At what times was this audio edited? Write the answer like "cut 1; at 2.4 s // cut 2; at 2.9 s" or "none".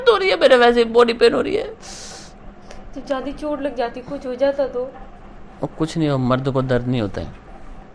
none